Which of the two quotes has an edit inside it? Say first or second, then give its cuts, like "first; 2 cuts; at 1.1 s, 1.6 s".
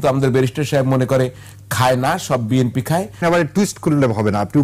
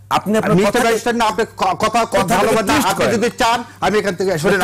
first; 1 cut; at 3.2 s